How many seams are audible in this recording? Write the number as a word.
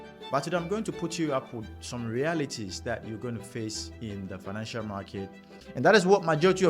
one